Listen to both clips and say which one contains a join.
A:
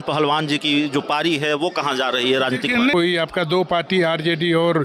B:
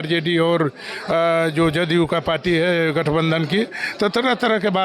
A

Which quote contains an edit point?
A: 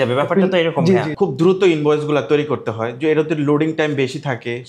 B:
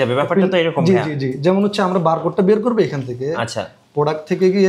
A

